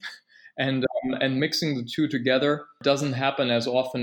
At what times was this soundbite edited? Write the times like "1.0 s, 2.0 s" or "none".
none